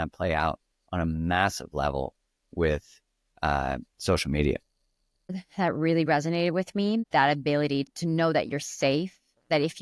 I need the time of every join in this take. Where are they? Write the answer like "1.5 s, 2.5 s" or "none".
5.4 s, 7.1 s, 7.9 s